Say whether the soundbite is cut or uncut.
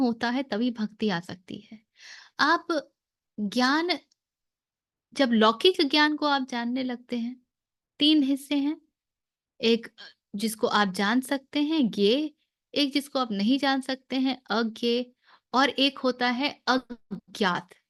uncut